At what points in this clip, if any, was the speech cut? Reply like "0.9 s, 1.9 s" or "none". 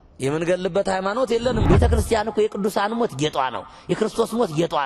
1.6 s